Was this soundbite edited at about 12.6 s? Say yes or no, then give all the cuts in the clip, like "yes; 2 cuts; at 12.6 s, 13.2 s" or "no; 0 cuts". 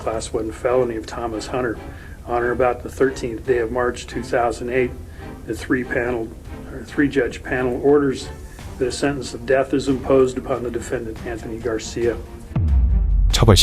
yes; 1 cut; at 12.6 s